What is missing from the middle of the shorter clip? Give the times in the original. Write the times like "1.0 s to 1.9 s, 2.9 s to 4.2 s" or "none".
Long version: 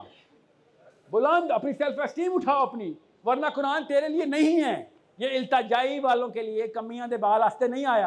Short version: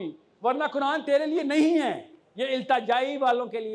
none